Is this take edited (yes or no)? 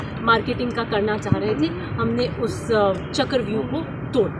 yes